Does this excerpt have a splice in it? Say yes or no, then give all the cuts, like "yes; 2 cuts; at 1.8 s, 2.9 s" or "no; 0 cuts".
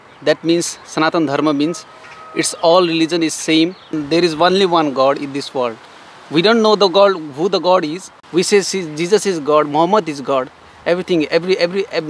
yes; 2 cuts; at 3.9 s, 8.1 s